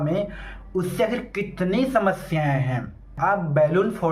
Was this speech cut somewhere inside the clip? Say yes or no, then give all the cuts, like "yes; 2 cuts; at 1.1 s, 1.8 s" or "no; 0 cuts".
yes; 1 cut; at 3.2 s